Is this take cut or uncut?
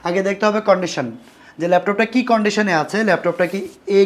uncut